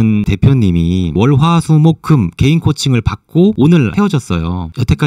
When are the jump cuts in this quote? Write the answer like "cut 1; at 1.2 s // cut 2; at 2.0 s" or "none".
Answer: none